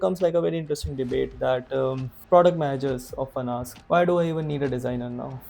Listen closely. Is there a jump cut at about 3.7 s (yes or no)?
yes